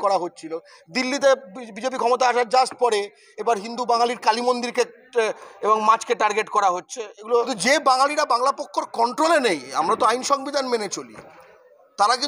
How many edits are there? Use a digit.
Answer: 1